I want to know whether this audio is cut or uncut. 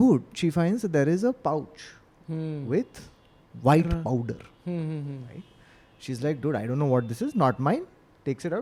uncut